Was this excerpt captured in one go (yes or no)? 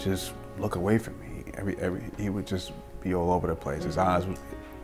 yes